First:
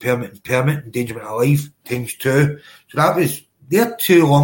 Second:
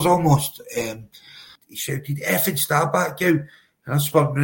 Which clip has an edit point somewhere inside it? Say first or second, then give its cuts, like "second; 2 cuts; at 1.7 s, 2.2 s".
second; 1 cut; at 1.7 s